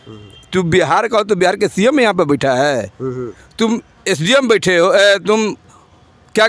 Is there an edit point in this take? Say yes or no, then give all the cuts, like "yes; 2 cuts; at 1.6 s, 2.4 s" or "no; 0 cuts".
no; 0 cuts